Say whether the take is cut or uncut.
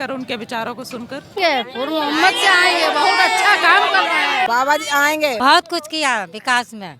cut